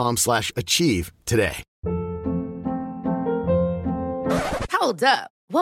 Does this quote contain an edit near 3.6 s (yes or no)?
no